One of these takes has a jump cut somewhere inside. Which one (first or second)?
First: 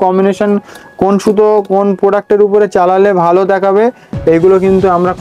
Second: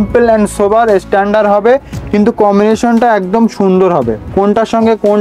second